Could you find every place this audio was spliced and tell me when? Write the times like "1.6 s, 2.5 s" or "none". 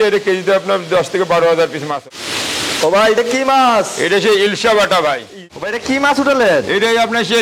1.9 s, 5.4 s